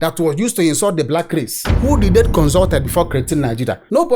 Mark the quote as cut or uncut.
cut